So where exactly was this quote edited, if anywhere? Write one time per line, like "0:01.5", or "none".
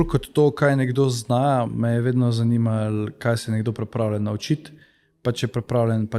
none